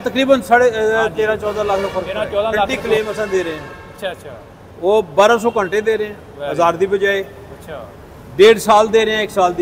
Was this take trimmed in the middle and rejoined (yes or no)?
yes